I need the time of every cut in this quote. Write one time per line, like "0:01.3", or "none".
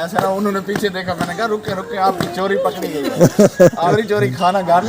0:03.8